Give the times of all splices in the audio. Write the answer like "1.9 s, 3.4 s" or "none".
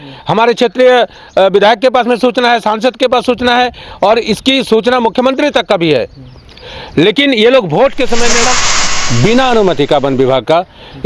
8.6 s